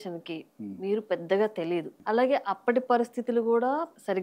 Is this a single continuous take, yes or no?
no